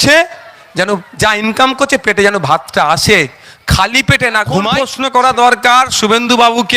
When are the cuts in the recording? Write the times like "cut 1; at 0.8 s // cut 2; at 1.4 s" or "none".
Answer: cut 1; at 4.9 s